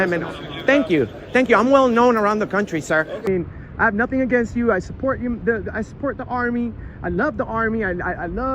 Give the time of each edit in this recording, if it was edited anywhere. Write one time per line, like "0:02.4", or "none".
0:03.2